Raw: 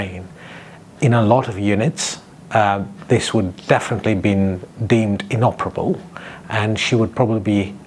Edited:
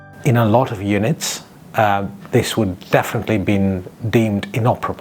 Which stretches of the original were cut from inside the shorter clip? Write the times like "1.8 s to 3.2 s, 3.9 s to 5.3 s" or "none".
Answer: none